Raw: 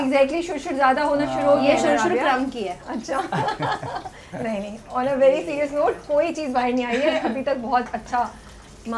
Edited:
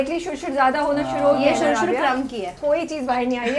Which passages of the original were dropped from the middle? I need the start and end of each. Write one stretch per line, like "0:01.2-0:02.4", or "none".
0:02.8-0:06.0